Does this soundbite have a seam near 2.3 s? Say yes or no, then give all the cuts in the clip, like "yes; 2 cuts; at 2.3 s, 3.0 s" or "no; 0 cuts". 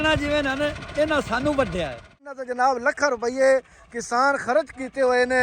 yes; 1 cut; at 2.3 s